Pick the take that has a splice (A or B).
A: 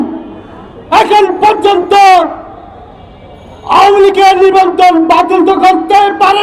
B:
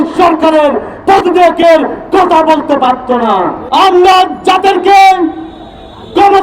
B